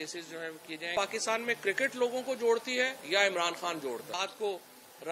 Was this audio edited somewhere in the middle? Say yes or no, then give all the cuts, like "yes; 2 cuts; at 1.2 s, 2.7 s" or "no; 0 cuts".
yes; 2 cuts; at 0.9 s, 4.2 s